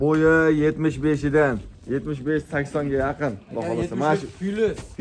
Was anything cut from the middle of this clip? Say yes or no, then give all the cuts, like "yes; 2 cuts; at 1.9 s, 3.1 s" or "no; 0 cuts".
no; 0 cuts